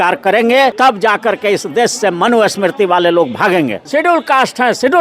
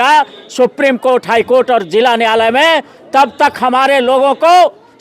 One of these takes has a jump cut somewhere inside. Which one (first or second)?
first